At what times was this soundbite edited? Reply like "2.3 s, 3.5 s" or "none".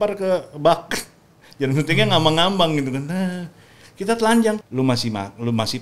4.6 s